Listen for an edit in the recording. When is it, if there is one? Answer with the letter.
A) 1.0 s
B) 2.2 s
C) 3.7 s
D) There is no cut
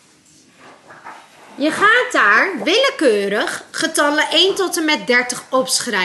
D